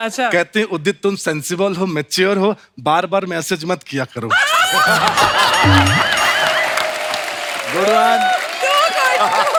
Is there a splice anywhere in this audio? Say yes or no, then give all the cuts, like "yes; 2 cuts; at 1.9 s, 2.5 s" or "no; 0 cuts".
no; 0 cuts